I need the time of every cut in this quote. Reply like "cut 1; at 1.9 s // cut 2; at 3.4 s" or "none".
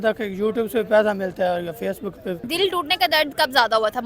cut 1; at 2.4 s